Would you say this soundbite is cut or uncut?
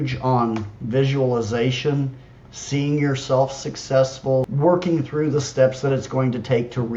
cut